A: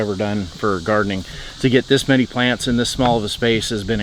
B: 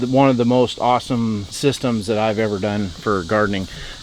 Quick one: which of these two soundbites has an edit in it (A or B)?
B